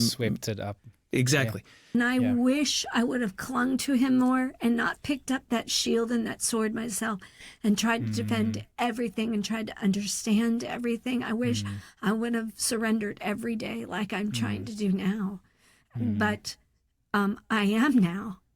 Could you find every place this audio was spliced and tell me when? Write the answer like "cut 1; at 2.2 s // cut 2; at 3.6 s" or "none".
cut 1; at 1.9 s